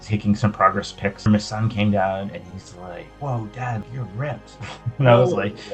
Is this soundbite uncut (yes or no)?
no